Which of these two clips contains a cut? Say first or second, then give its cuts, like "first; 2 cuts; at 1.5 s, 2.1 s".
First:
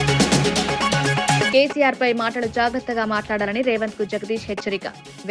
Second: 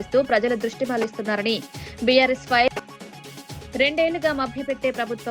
first; 1 cut; at 1.5 s